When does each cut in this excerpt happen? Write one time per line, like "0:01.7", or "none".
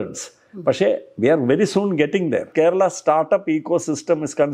0:02.5